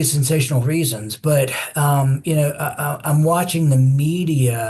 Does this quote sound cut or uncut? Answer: uncut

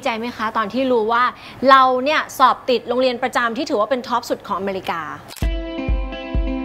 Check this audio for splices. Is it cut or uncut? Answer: uncut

